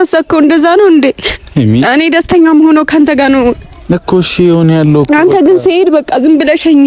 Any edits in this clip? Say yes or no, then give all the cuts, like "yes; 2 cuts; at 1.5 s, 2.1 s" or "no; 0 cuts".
no; 0 cuts